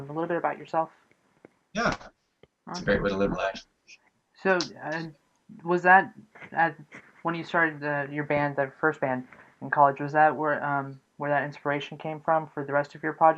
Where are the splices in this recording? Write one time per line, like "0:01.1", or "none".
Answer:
none